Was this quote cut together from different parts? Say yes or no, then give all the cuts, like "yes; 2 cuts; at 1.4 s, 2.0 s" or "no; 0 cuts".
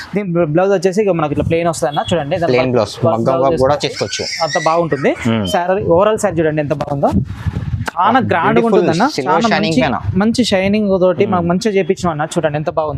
no; 0 cuts